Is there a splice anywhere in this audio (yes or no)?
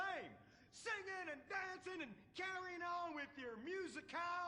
no